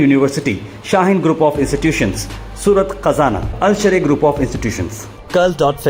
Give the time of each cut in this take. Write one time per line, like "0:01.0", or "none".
none